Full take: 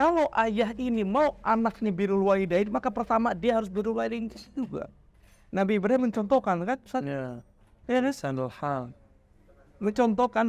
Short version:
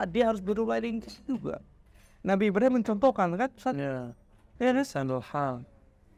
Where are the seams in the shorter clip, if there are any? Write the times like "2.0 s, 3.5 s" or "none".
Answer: none